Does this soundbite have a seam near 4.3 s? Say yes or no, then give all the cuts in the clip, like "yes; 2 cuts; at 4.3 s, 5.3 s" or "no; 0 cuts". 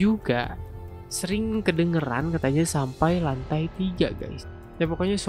yes; 1 cut; at 4.3 s